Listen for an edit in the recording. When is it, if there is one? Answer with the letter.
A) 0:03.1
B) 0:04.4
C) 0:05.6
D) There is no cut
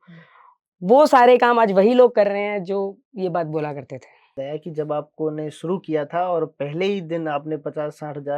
B